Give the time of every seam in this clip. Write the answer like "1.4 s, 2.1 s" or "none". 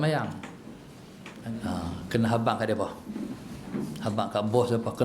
1.3 s